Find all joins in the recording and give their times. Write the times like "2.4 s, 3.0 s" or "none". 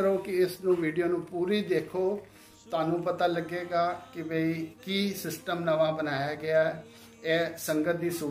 none